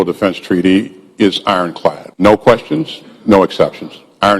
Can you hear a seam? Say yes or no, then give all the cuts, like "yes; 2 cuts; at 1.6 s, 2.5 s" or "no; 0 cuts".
yes; 1 cut; at 2.1 s